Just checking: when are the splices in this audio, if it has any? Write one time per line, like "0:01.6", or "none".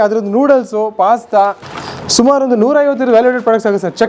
none